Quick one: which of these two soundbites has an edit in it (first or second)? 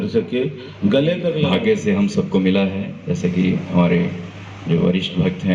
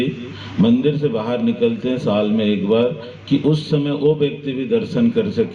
first